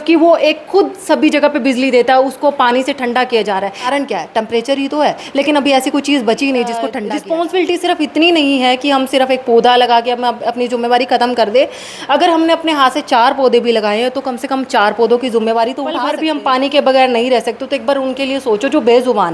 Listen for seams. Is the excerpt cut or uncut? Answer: cut